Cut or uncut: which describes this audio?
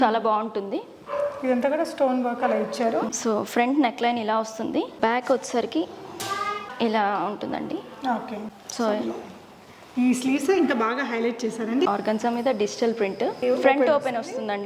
cut